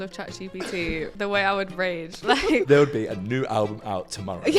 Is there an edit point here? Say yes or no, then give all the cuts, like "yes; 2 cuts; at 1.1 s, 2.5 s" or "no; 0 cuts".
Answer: yes; 2 cuts; at 1.1 s, 2.6 s